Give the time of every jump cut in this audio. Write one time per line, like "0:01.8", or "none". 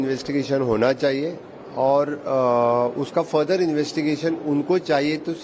none